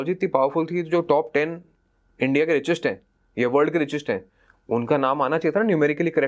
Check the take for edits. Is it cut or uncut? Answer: uncut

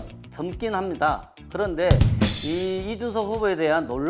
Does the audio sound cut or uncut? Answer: uncut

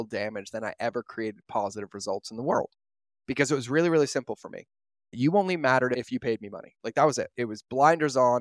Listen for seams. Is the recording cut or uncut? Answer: cut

